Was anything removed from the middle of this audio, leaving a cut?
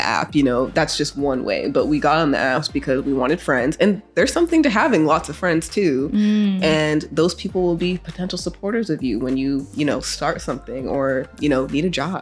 no; 0 cuts

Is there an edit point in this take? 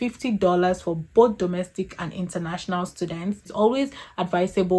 yes; 1 cut; at 3.4 s

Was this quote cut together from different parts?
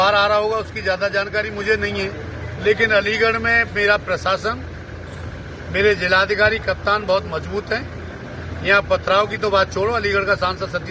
no; 0 cuts

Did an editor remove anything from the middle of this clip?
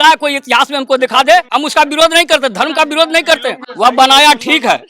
yes; 2 cuts; at 1.5 s, 3.6 s

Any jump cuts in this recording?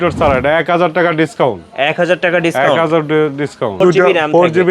yes; 1 cut; at 3.8 s

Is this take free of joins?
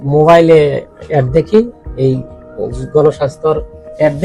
yes; 0 cuts

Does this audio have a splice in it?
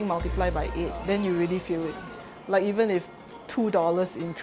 yes; 1 cut; at 1.0 s

